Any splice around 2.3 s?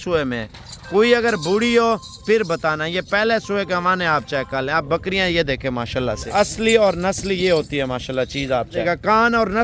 no; 2 cuts; at 6.2 s, 8.8 s

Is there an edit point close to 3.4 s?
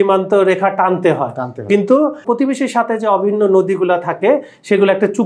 no; 1 cut; at 2.2 s

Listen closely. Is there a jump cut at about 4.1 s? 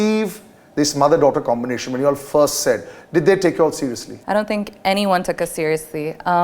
yes; 1 cut; at 4.1 s

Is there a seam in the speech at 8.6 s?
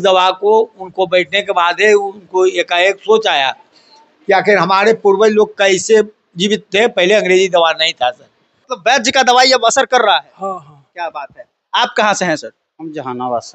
yes; 1 cut; at 8.6 s

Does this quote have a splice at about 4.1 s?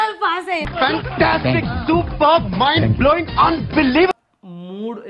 yes; 1 cut; at 4.1 s

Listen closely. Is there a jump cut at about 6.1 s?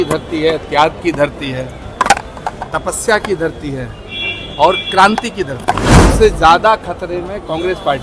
yes; 1 cut; at 6.1 s

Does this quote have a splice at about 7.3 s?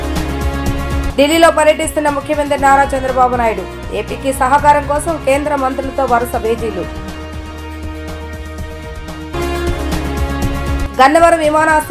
no; 1 cut; at 0.9 s

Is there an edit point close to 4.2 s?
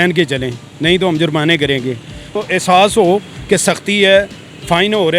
no; 1 cut; at 2.3 s

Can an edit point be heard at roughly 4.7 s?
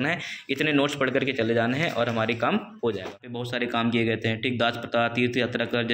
no; 1 cut; at 3.4 s

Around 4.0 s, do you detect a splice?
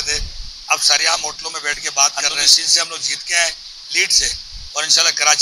no; 1 cut; at 2.1 s

